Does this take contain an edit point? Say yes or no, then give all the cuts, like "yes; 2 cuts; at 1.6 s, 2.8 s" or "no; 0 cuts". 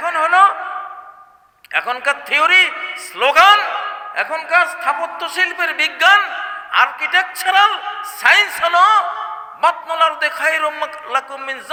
no; 0 cuts